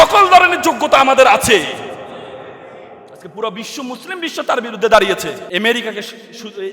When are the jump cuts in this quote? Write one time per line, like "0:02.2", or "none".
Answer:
0:05.4